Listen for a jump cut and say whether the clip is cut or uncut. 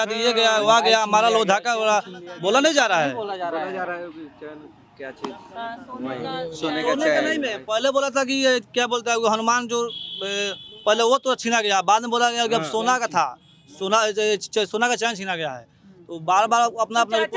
uncut